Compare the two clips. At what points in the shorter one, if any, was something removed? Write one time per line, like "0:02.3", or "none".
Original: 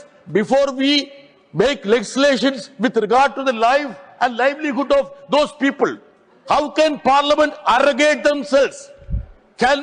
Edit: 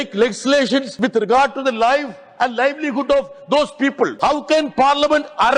0:00.9
0:04.1